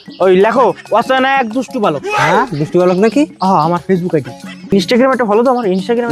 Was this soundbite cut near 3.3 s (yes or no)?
no